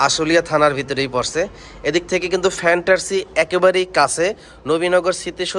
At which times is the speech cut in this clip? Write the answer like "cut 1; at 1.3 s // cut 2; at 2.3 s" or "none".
none

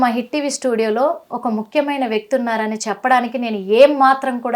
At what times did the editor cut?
none

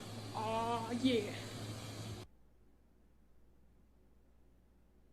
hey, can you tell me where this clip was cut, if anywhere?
cut 1; at 2.2 s

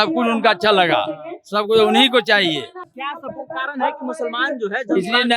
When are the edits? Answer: cut 1; at 3.0 s

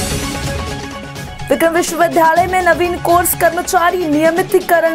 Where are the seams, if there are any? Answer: cut 1; at 1.2 s

